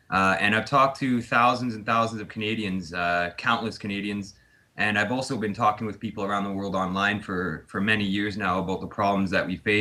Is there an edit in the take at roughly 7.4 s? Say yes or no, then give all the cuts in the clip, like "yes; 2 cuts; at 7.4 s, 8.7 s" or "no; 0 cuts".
yes; 1 cut; at 7.4 s